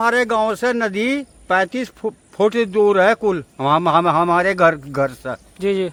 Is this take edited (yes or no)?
no